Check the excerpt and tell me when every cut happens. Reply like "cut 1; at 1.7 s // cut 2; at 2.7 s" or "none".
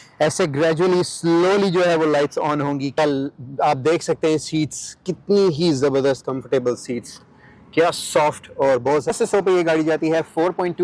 cut 1; at 3.0 s // cut 2; at 9.1 s